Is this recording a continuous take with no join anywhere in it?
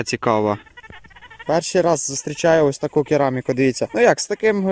no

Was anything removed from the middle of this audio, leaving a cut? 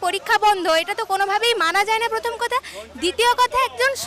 no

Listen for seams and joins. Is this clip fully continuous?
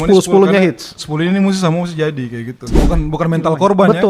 no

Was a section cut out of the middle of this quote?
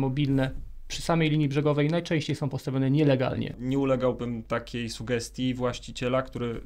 yes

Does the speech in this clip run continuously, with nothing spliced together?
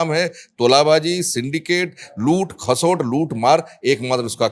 yes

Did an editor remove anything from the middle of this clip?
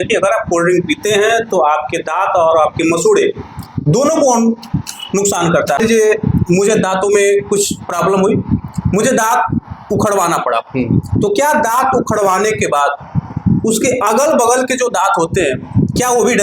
yes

